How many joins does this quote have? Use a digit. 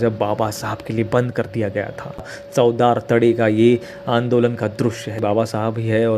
2